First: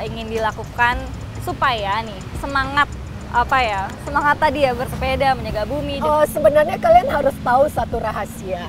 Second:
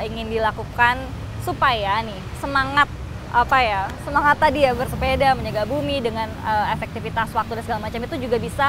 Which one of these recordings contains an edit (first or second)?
first